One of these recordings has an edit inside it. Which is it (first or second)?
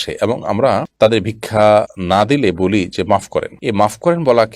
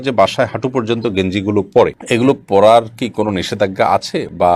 first